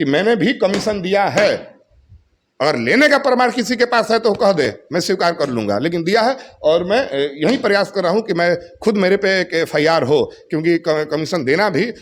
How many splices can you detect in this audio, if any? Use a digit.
0